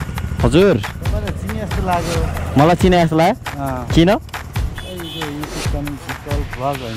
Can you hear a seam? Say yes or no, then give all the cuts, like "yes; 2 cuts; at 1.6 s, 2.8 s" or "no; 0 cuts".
no; 0 cuts